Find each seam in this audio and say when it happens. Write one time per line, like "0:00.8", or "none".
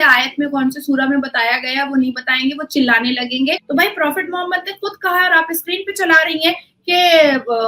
0:03.6